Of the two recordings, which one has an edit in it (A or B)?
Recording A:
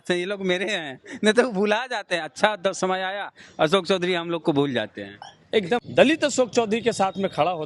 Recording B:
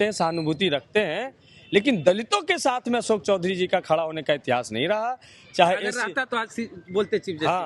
A